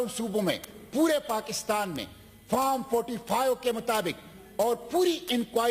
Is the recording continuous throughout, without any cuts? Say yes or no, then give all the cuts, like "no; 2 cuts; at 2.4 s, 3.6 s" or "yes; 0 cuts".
yes; 0 cuts